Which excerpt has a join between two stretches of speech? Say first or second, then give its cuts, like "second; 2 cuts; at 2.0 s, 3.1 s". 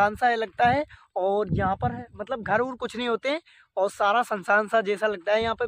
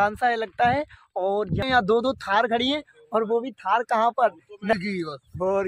second; 2 cuts; at 1.6 s, 4.7 s